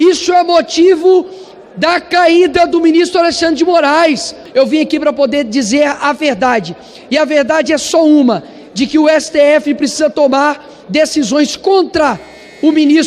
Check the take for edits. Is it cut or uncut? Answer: cut